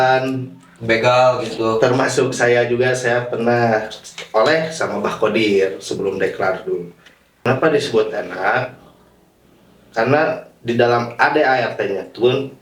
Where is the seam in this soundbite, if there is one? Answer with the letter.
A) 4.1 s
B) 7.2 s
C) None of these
B